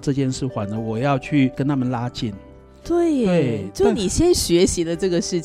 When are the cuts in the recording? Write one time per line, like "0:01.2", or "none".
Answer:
none